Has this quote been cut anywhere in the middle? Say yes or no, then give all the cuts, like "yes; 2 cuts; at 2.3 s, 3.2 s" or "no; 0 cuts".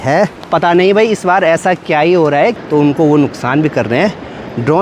yes; 1 cut; at 2.6 s